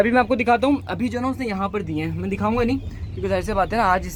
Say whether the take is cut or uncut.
uncut